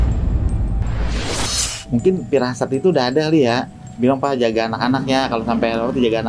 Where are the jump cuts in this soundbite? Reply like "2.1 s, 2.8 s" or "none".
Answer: 1.8 s